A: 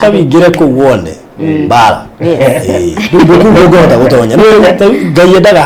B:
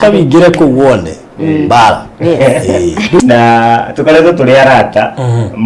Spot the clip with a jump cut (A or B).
B